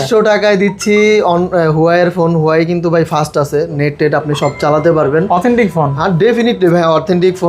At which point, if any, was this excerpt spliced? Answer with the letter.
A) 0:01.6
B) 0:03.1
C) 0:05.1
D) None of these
D